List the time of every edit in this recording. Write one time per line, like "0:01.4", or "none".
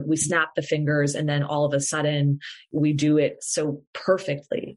0:02.7